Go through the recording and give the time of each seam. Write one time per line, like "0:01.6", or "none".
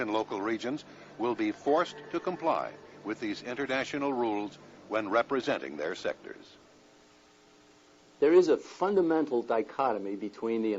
0:05.3